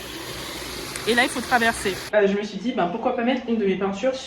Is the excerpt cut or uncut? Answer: cut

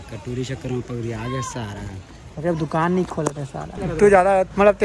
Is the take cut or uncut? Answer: cut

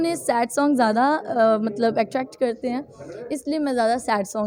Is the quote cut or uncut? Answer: uncut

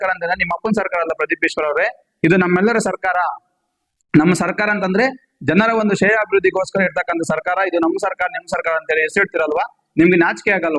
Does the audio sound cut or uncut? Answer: uncut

